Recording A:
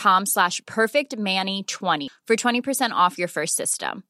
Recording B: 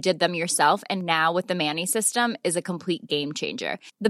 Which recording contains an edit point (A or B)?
A